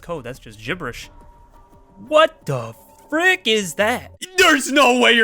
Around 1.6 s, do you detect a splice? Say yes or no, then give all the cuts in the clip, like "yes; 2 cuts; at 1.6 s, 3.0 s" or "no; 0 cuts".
no; 1 cut; at 4.2 s